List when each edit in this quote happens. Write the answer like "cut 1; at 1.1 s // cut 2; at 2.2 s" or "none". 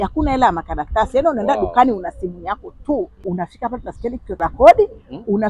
cut 1; at 3.1 s // cut 2; at 4.4 s